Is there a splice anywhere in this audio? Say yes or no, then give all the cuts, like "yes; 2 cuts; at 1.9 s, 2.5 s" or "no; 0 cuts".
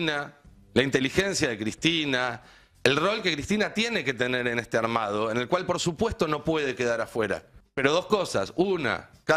yes; 1 cut; at 7.6 s